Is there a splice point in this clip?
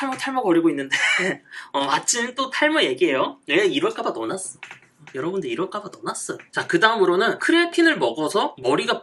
no; 0 cuts

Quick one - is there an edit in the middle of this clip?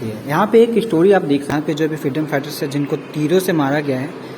yes; 1 cut; at 1.5 s

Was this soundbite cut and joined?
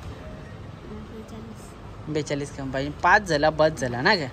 no; 0 cuts

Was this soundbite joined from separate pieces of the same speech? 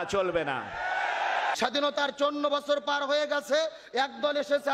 yes; 1 cut; at 1.6 s

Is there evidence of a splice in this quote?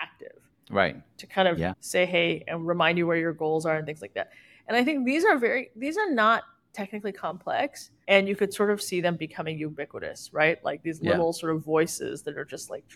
no; 0 cuts

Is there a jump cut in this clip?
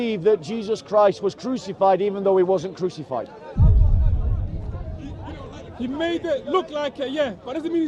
no; 0 cuts

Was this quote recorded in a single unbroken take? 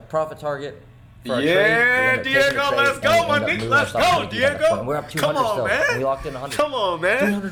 yes; 0 cuts

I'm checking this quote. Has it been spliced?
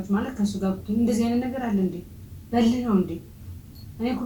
no; 0 cuts

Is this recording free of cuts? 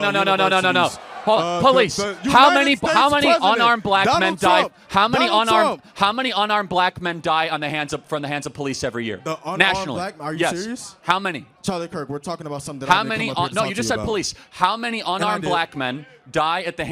yes; 0 cuts

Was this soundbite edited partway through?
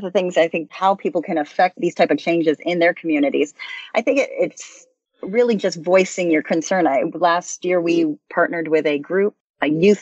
yes; 2 cuts; at 0.7 s, 1.8 s

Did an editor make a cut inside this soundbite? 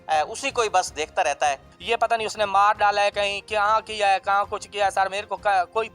yes; 1 cut; at 1.7 s

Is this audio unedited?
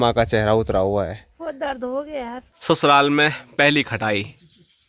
no; 1 cut; at 2.5 s

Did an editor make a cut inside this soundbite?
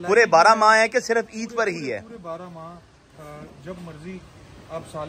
no; 0 cuts

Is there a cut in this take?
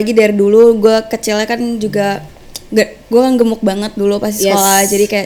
no; 0 cuts

